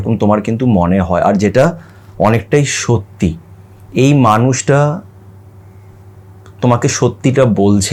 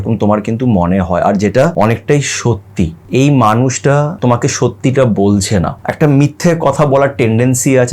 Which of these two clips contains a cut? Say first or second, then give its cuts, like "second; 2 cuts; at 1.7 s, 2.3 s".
second; 4 cuts; at 1.7 s, 3.0 s, 4.1 s, 5.8 s